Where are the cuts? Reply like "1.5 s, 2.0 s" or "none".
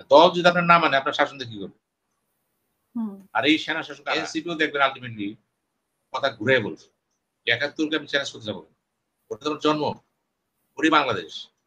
3.9 s